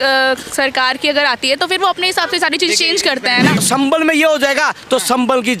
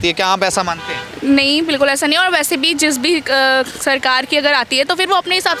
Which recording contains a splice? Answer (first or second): first